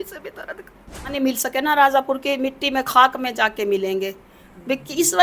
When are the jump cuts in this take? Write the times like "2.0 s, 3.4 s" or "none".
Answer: 1.1 s